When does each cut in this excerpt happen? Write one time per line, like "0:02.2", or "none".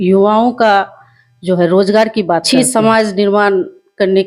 0:02.4